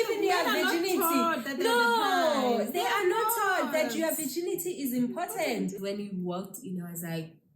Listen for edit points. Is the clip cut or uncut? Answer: cut